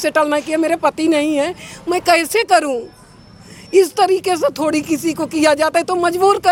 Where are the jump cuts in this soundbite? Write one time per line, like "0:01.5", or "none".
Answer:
none